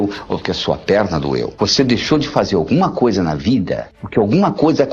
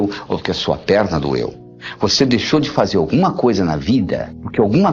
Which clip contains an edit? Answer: first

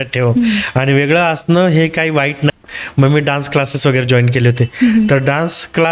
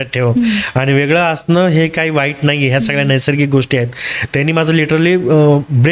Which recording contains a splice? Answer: first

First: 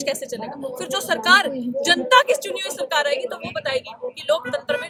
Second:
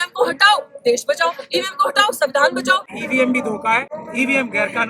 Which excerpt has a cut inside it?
second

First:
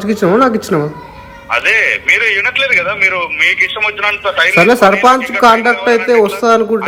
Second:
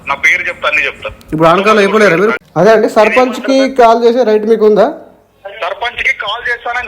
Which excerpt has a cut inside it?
second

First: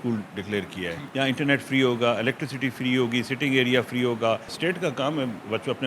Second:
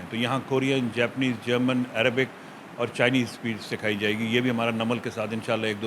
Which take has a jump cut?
first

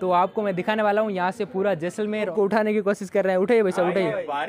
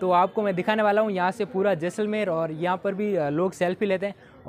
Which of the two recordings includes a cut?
first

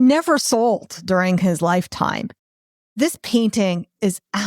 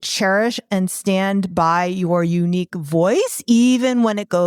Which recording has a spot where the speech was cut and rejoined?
first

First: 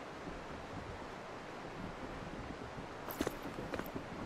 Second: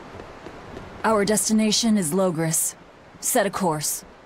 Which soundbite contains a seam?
first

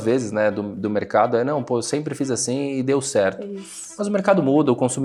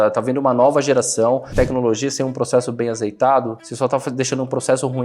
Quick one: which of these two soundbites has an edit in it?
second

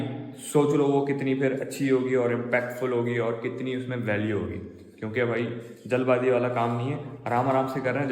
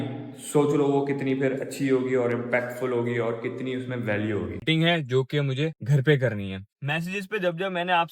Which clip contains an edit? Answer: second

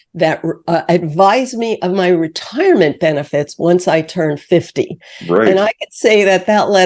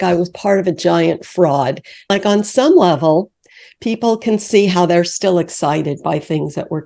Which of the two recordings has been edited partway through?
second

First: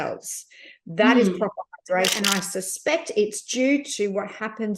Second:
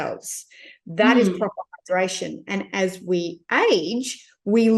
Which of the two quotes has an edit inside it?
first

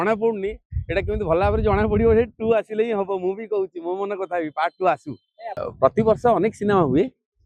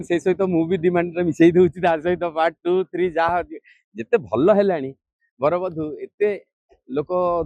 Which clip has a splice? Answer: first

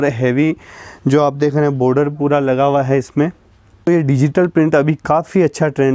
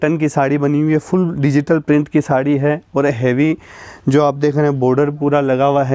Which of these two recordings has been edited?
first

